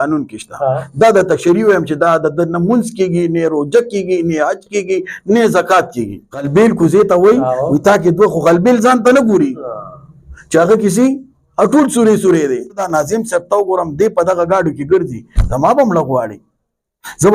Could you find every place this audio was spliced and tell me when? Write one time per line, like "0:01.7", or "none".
0:06.5
0:12.8